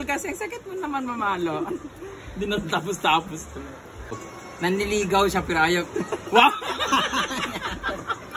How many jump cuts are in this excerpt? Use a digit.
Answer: 1